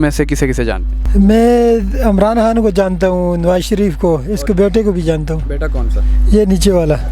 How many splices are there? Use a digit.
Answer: 1